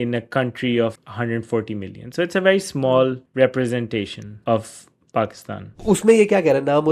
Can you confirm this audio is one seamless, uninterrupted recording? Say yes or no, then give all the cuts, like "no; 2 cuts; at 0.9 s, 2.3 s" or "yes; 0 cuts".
no; 4 cuts; at 1.0 s, 3.2 s, 4.2 s, 5.7 s